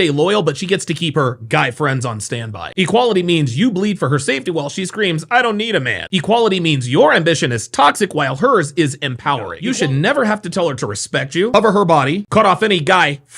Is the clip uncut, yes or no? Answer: no